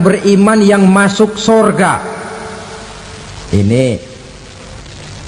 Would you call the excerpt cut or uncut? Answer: uncut